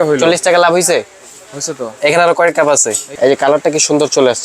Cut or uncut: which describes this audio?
cut